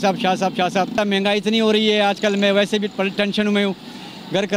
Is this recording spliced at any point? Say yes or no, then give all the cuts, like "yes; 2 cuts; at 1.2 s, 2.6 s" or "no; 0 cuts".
yes; 1 cut; at 1.0 s